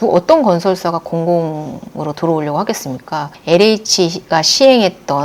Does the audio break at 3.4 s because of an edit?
yes; 1 cut; at 3.4 s

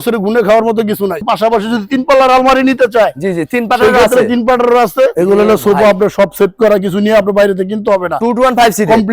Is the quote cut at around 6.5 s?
no; 2 cuts; at 1.2 s, 5.1 s

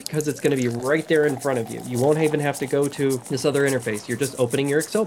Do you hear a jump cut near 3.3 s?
yes; 1 cut; at 3.3 s

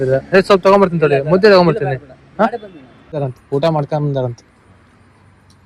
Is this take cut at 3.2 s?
yes; 1 cut; at 3.2 s

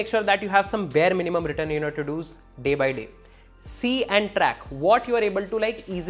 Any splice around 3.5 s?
no; 0 cuts

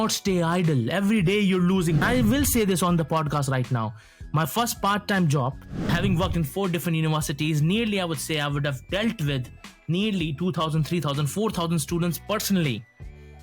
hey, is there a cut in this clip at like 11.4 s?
no; 2 cuts; at 2.0 s, 5.9 s

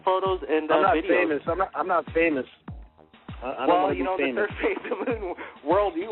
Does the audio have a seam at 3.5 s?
yes; 1 cut; at 3.5 s

